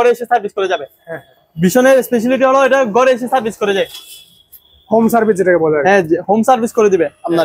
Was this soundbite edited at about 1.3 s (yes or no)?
no